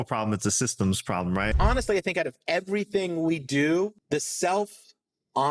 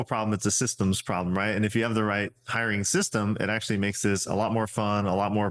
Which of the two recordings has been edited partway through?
first; 2 cuts; at 1.5 s, 4.0 s

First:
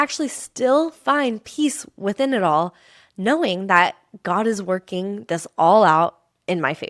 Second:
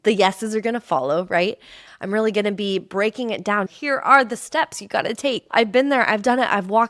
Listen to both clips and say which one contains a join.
second; 3 cuts; at 1.8 s, 3.7 s, 5.4 s

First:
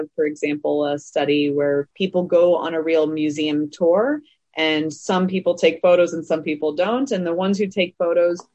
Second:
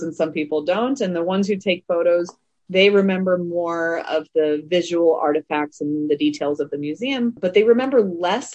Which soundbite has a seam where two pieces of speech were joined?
first; 1 cut; at 1.9 s

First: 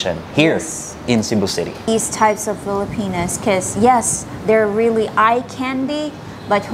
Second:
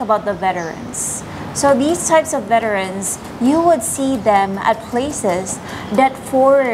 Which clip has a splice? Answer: first; 1 cut; at 1.9 s

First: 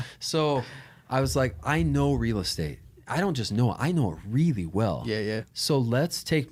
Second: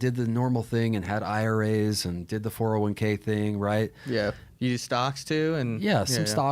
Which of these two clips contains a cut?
second; 1 cut; at 4.5 s

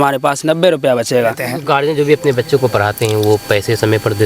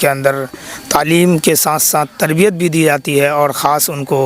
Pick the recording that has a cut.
first; 1 cut; at 1.5 s

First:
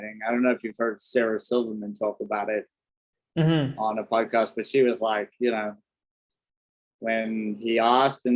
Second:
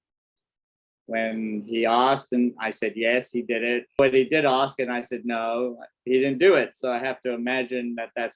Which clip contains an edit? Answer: second; 1 cut; at 4.0 s

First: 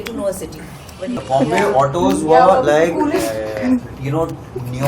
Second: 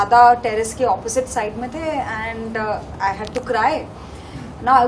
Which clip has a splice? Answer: first; 1 cut; at 1.1 s

